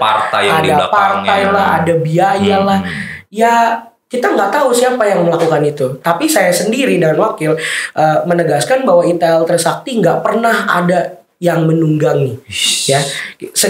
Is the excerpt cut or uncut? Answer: uncut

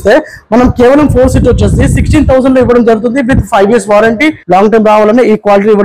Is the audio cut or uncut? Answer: cut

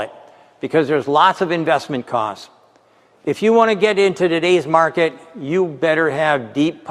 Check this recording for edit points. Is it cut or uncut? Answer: uncut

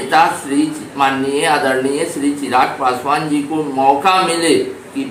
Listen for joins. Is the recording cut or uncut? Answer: uncut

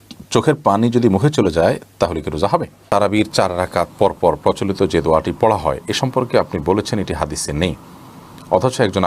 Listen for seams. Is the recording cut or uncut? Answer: cut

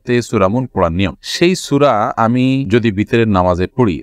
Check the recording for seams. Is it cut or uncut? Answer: uncut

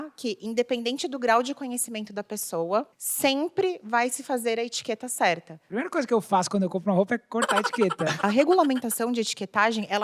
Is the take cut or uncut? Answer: cut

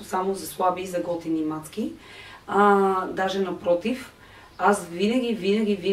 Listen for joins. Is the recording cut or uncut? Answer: uncut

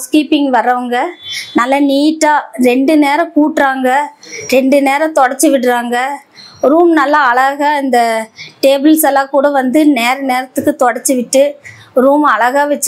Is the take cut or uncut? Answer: uncut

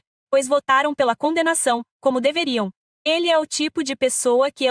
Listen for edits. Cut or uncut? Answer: cut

